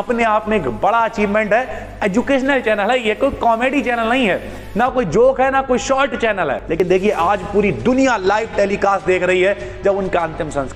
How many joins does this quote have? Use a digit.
1